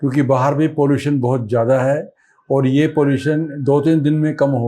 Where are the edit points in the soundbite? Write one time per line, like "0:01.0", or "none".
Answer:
none